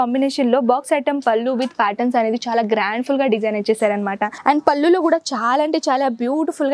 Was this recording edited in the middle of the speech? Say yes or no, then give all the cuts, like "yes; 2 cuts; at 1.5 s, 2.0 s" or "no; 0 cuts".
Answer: yes; 1 cut; at 4.3 s